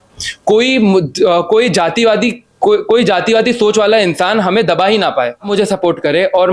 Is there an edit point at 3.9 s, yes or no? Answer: no